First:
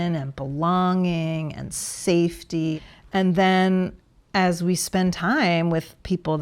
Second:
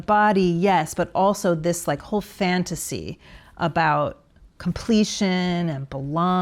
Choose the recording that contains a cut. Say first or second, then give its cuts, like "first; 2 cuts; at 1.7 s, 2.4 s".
first; 1 cut; at 2.8 s